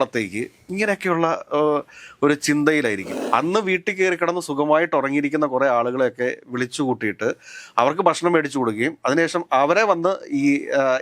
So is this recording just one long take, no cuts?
no; 1 cut; at 3.1 s

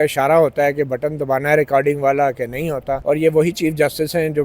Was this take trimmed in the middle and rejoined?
yes; 1 cut; at 2.9 s

